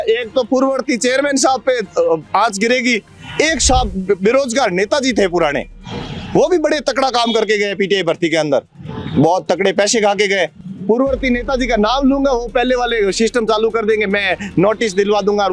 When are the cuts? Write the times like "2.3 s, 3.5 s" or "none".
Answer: none